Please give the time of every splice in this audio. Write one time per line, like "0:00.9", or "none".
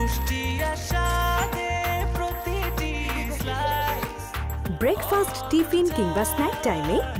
none